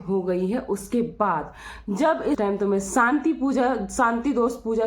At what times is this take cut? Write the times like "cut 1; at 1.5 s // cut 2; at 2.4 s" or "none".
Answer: cut 1; at 2.4 s

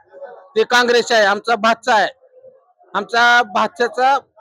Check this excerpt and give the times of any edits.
none

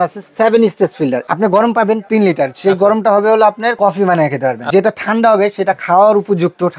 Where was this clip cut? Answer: cut 1; at 1.3 s // cut 2; at 4.7 s

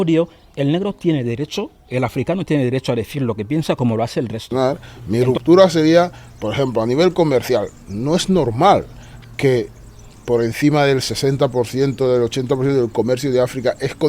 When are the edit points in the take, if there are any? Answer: cut 1; at 4.4 s

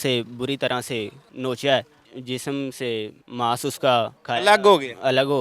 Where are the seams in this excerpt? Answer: cut 1; at 1.2 s // cut 2; at 2.1 s // cut 3; at 3.2 s // cut 4; at 4.2 s

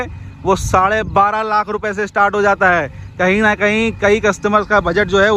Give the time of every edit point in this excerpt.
none

